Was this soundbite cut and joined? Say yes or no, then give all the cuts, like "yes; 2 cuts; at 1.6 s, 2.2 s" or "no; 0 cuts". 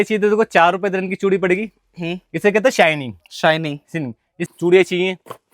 yes; 1 cut; at 4.5 s